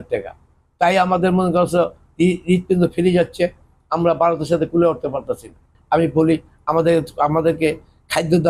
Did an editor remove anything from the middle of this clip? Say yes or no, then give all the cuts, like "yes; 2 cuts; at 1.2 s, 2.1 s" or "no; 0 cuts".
yes; 1 cut; at 5.7 s